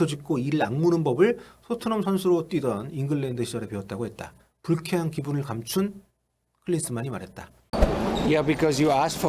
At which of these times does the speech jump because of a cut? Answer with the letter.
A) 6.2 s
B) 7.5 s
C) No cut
B